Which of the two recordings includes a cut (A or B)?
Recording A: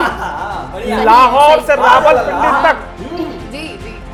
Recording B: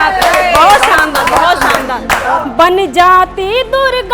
B